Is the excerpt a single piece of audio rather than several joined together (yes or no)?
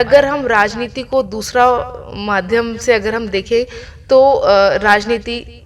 yes